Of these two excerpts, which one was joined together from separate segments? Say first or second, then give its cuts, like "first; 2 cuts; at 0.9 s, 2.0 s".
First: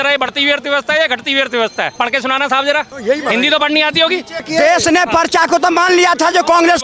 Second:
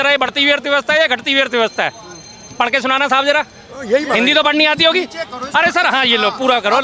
first; 3 cuts; at 1.9 s, 2.9 s, 4.5 s